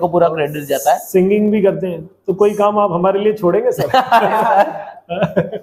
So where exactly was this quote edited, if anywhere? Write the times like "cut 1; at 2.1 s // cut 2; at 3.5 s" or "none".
none